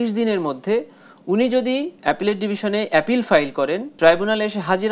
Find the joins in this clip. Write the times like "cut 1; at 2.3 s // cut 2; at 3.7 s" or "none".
cut 1; at 1.9 s // cut 2; at 3.9 s